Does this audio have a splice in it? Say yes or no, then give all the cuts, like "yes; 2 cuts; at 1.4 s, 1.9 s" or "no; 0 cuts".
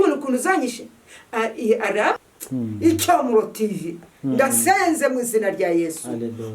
yes; 1 cut; at 2.2 s